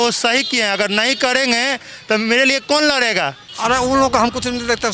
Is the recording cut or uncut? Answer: cut